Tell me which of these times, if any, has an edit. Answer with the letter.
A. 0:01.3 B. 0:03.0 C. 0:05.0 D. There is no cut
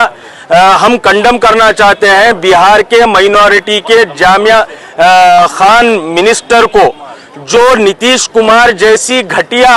D